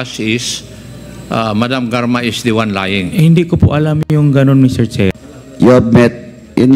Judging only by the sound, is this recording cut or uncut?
cut